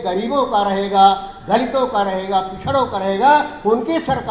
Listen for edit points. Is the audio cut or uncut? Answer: uncut